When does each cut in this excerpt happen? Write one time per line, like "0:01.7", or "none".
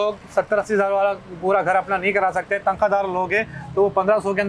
none